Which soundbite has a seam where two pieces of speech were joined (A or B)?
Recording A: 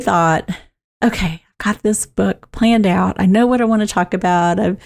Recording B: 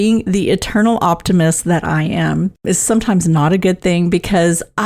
B